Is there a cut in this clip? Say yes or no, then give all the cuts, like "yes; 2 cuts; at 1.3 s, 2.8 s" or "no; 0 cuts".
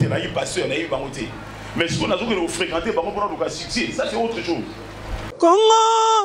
yes; 1 cut; at 5.4 s